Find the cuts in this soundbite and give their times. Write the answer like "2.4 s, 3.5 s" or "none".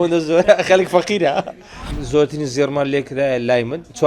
1.8 s